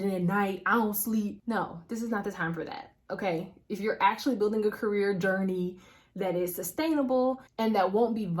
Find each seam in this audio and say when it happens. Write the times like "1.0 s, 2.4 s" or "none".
1.4 s